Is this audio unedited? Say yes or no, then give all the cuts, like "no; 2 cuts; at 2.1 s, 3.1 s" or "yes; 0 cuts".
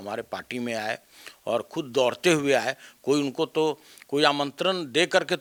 yes; 0 cuts